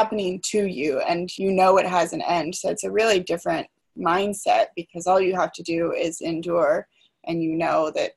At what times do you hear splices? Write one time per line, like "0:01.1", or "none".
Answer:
0:01.3